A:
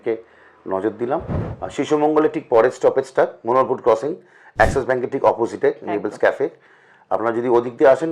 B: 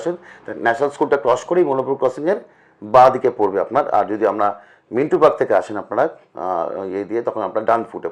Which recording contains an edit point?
A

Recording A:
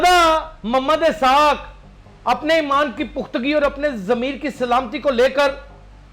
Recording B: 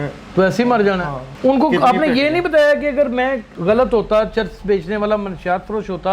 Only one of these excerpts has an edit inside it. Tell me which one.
B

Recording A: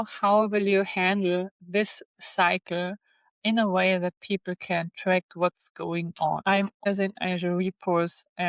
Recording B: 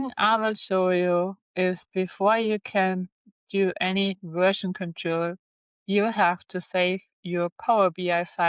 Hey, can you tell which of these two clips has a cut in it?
A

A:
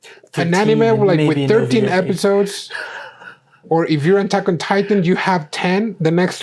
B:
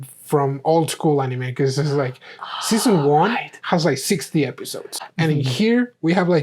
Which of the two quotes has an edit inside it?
B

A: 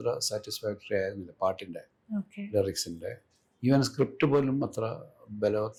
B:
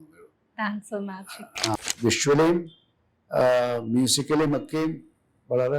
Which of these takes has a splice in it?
B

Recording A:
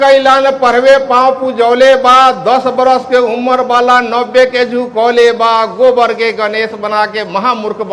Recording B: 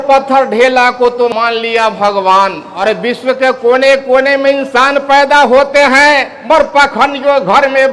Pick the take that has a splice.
B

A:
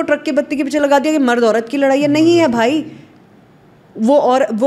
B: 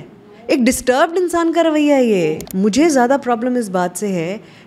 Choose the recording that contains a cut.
B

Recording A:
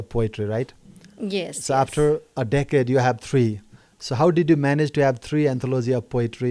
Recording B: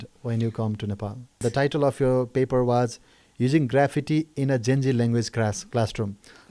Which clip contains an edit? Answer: B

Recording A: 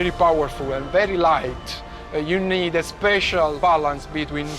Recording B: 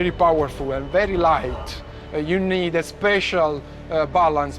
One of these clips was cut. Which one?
A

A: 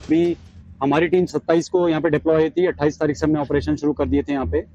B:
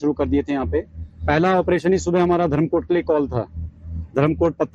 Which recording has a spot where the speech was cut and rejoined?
B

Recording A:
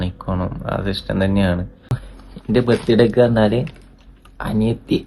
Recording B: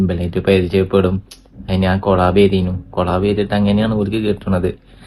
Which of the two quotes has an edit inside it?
A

